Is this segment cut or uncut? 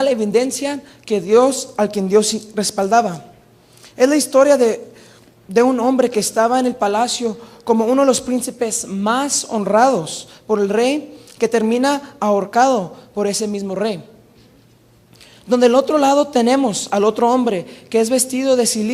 cut